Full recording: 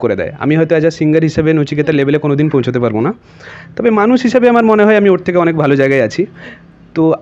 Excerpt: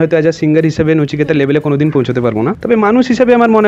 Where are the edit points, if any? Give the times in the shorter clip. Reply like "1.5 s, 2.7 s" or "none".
2.6 s